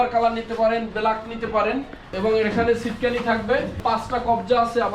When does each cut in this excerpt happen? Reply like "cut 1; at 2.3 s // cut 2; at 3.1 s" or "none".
cut 1; at 2.1 s // cut 2; at 3.8 s